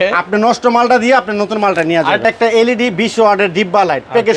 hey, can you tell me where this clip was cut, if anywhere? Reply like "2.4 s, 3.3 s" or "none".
2.2 s